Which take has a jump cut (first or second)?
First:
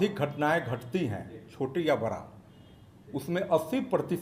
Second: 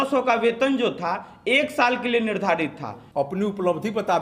second